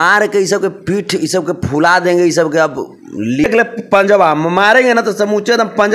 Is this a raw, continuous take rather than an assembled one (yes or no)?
no